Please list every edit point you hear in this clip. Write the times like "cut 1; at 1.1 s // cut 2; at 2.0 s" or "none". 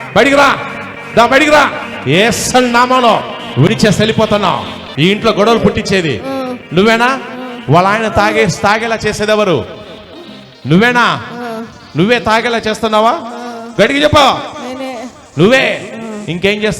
cut 1; at 4.8 s